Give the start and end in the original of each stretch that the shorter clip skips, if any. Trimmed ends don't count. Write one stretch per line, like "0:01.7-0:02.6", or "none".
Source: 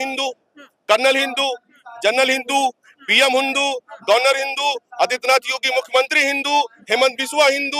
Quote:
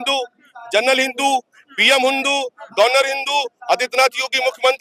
none